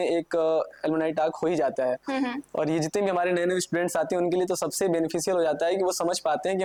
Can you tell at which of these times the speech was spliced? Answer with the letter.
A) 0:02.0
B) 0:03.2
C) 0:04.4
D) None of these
D